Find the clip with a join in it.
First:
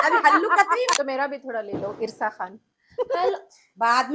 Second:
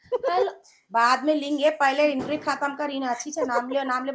first; 1 cut; at 0.9 s

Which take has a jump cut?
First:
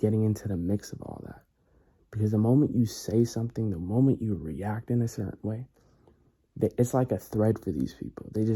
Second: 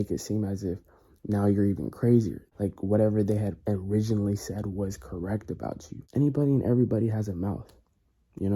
second; 2 cuts; at 2.4 s, 5.9 s

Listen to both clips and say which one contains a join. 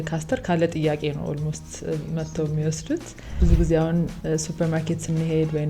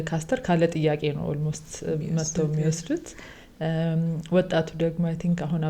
first; 1 cut; at 3.3 s

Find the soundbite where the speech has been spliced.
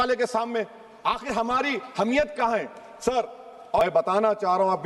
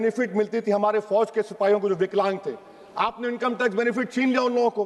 first; 1 cut; at 3.8 s

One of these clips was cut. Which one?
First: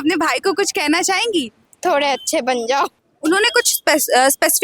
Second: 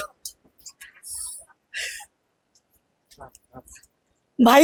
first; 2 cuts; at 1.6 s, 3.0 s

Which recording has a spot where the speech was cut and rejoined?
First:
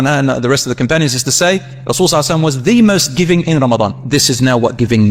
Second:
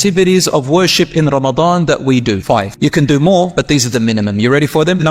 second; 1 cut; at 2.7 s

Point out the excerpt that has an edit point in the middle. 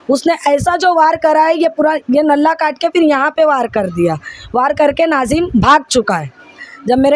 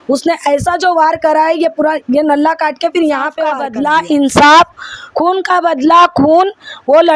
second; 1 cut; at 3.7 s

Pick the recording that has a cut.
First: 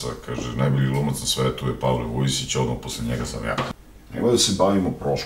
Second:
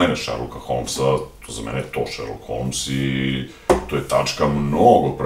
first; 1 cut; at 3.7 s

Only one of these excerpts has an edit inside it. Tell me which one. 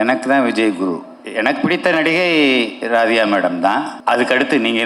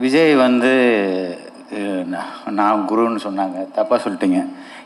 first; 2 cuts; at 1.2 s, 3.9 s

